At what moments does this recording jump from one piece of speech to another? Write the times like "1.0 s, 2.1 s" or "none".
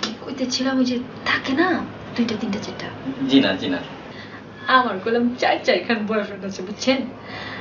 5.1 s